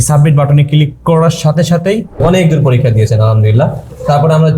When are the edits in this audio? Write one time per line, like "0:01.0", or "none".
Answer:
0:02.2